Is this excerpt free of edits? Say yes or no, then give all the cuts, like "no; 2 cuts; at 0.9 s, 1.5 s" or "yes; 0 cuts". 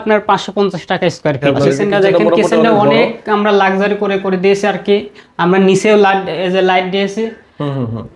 no; 1 cut; at 1.4 s